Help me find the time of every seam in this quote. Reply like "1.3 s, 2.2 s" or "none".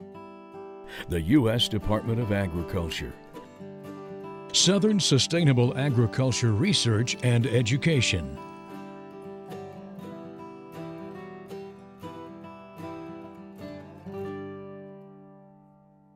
none